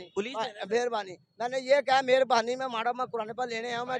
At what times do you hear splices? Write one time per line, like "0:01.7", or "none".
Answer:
none